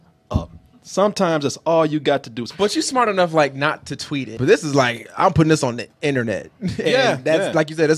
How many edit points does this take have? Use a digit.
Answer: 2